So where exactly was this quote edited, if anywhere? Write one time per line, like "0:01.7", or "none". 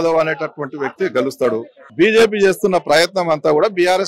0:01.8